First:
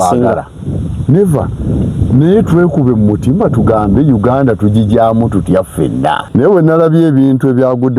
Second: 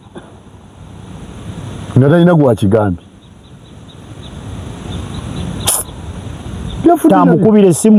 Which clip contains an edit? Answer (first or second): first